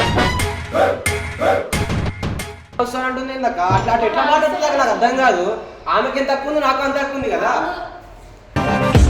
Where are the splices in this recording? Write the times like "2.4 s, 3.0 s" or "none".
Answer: 2.8 s